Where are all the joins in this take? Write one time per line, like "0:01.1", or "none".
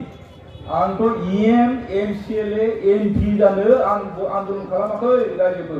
none